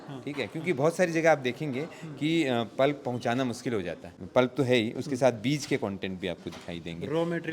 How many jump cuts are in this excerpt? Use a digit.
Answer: 1